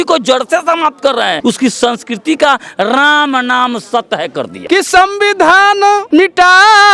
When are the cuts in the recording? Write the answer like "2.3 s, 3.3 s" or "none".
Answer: 1.4 s, 4.6 s, 6.0 s